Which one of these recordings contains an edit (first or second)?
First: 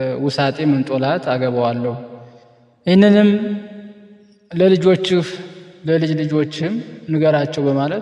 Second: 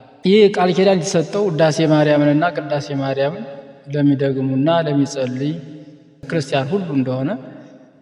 second